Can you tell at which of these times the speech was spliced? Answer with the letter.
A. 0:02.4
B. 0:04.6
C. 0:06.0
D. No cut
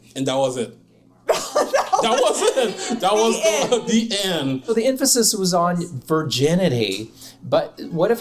B